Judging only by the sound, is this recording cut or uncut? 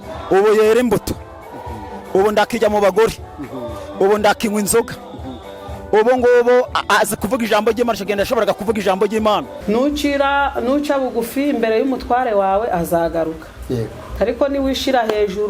cut